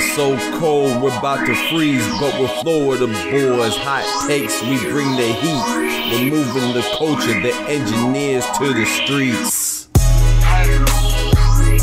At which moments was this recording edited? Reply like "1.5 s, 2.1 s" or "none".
none

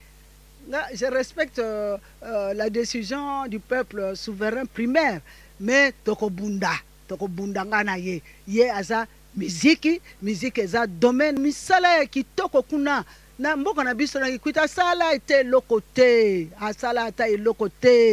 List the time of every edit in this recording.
11.4 s

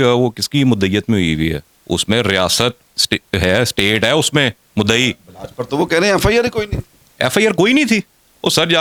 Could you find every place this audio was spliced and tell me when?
none

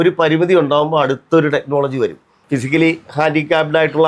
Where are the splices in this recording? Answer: 2.3 s

